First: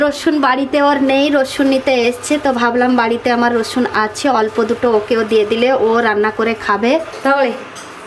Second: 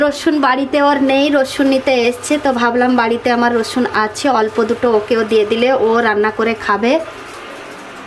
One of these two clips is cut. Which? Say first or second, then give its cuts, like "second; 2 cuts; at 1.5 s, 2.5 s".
first; 1 cut; at 7.1 s